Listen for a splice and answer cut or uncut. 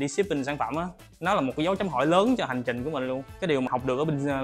cut